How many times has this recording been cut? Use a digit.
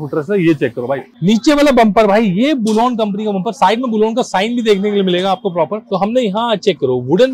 2